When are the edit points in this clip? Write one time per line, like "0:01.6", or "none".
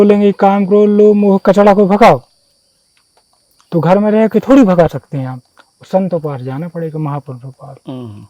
none

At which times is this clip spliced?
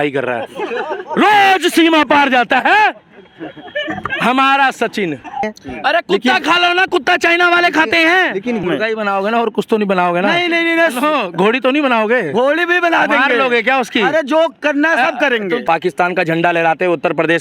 0:05.5
0:08.7
0:15.6

